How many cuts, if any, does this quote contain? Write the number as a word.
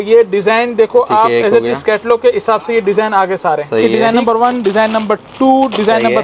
one